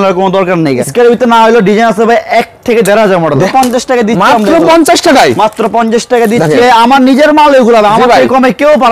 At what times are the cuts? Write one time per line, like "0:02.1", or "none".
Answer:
0:00.9
0:03.5
0:06.6